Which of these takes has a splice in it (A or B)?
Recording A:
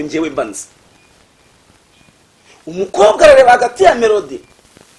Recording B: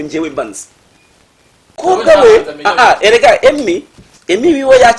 B